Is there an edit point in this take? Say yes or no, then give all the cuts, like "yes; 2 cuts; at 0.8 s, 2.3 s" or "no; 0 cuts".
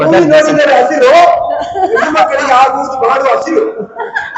no; 0 cuts